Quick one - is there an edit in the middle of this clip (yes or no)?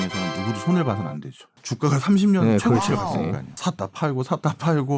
yes